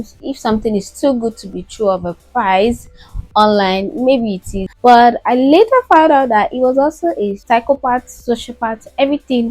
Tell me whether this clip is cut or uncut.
cut